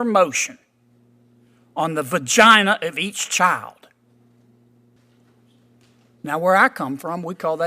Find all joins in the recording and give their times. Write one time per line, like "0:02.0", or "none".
0:05.0